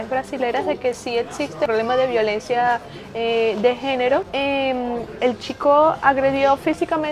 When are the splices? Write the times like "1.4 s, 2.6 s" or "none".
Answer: 1.7 s, 4.3 s

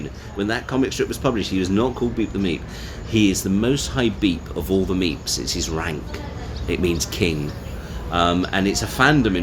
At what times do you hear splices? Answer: none

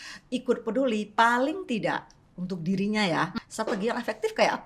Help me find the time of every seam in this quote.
3.3 s

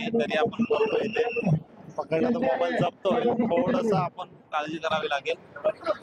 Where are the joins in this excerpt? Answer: none

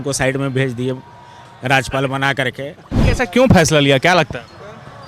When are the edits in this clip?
3.0 s

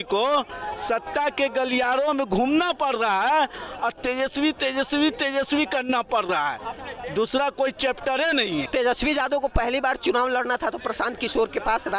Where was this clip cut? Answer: 8.7 s

